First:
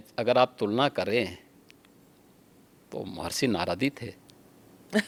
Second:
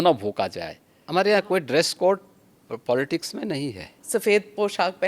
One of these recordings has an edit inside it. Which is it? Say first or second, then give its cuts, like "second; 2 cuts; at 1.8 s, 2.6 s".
second; 2 cuts; at 1.1 s, 4.0 s